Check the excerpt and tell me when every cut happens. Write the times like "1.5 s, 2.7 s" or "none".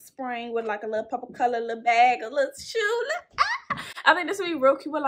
none